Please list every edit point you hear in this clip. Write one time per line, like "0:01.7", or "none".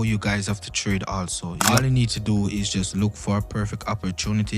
0:01.8